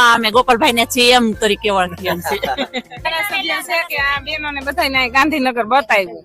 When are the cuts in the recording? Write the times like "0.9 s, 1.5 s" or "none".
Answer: 3.1 s

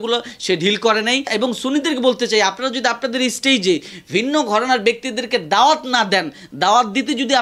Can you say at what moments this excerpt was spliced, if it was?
1.3 s

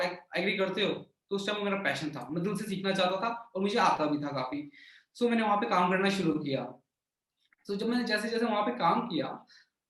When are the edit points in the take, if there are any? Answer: none

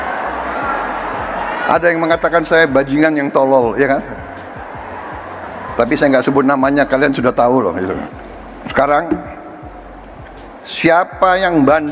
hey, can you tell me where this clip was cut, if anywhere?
8.1 s

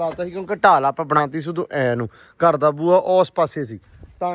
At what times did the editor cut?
none

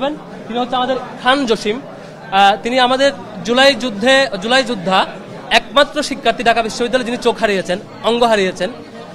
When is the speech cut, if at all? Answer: none

